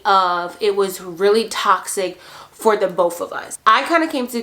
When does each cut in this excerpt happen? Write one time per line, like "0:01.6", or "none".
0:03.5